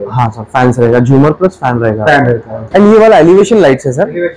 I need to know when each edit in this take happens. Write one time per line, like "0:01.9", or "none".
0:02.6